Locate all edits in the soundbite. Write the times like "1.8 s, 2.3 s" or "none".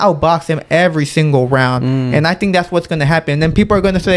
none